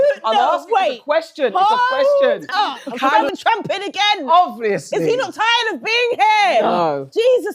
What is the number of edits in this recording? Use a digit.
1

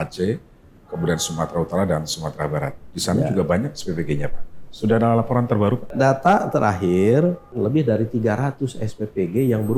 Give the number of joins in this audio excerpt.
2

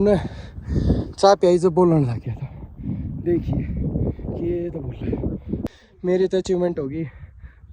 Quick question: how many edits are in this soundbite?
1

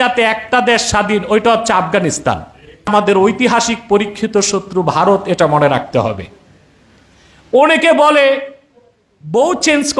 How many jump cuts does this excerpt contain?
1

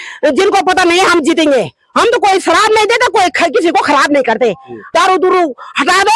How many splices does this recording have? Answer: 1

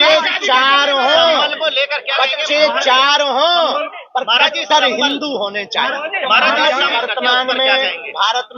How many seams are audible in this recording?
1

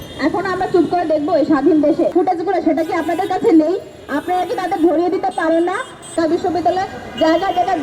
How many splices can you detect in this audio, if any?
2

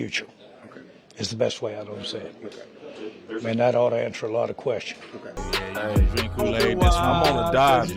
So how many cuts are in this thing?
1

